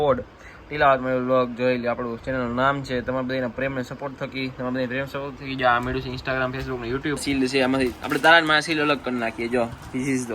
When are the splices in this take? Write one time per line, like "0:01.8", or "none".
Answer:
0:07.2